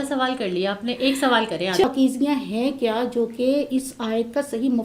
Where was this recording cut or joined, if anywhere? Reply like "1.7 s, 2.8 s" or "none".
1.8 s